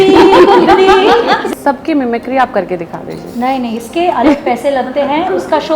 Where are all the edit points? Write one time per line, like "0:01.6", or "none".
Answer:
0:01.5

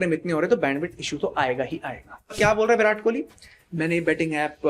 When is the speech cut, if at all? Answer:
0:02.3

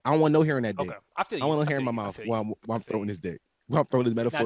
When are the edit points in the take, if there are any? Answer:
0:01.0

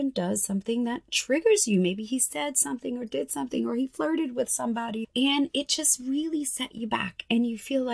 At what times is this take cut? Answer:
0:05.0

